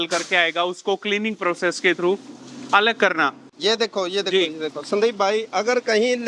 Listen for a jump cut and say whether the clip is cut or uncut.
cut